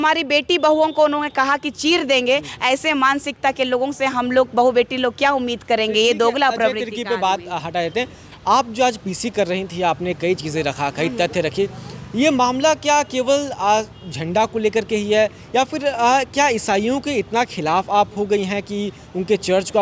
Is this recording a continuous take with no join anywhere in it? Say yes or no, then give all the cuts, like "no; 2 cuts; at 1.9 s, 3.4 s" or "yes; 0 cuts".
yes; 0 cuts